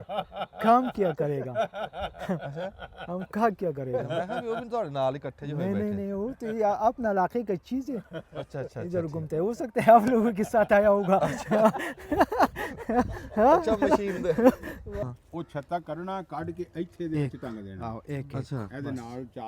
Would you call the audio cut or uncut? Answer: cut